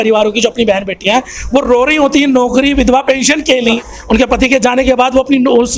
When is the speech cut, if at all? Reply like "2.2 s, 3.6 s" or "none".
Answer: 3.8 s